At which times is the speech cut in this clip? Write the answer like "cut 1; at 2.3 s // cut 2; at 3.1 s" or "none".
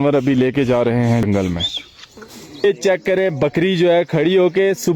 cut 1; at 1.2 s // cut 2; at 2.6 s